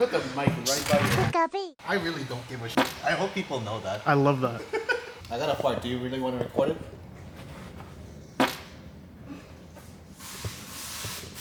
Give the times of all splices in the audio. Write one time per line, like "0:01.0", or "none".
none